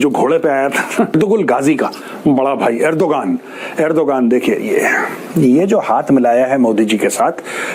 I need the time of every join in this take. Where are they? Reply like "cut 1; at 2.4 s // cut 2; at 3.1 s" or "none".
cut 1; at 1.1 s